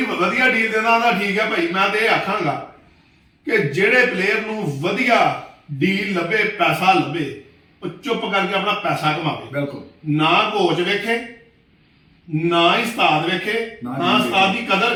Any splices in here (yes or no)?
no